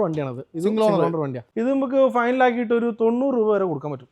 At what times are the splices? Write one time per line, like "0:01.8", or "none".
0:01.4